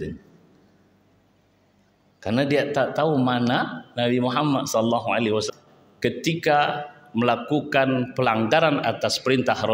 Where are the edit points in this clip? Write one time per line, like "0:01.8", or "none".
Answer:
0:05.5